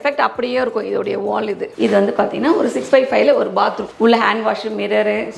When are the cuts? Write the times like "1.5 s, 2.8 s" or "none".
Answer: 1.7 s, 3.9 s